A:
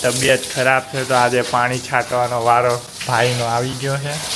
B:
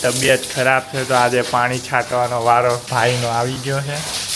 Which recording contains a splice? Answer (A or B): B